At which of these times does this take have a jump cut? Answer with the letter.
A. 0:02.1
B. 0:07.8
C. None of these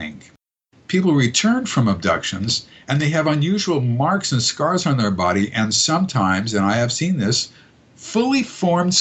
C